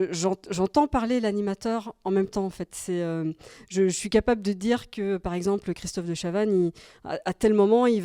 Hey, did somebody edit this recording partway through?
no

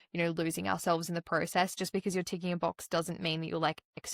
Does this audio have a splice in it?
yes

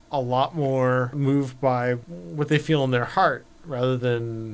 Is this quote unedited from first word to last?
no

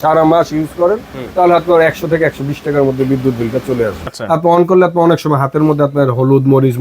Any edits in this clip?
yes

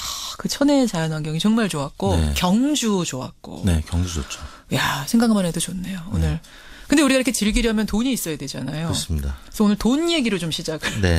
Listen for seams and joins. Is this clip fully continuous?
no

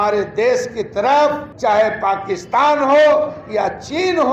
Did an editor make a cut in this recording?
yes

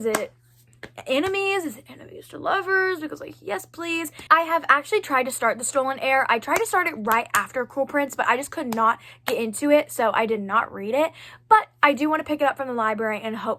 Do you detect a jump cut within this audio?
no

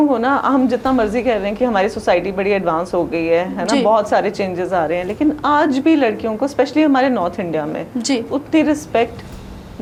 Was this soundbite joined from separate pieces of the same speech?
no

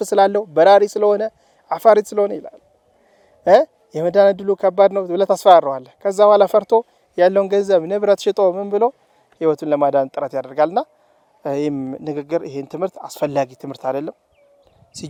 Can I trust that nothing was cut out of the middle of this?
yes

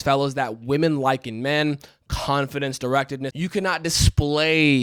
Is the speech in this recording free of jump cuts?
no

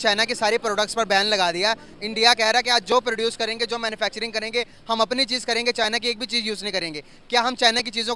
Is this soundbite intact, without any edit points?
yes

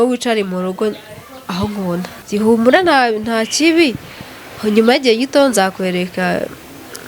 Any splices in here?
no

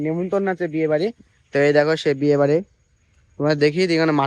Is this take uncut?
yes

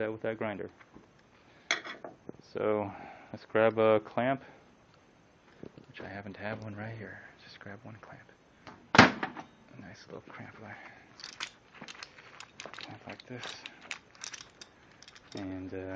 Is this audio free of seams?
no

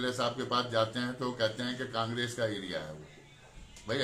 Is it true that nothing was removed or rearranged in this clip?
yes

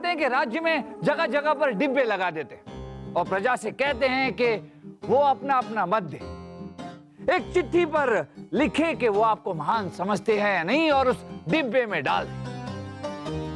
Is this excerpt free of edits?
yes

